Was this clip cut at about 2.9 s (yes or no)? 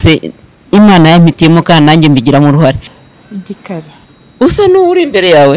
yes